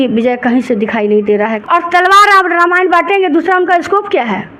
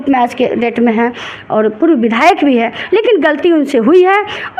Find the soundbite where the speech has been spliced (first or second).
first